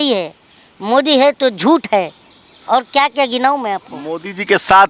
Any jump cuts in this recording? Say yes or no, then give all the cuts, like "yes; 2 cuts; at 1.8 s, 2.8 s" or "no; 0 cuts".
no; 0 cuts